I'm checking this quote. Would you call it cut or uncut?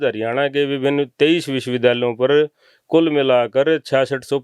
uncut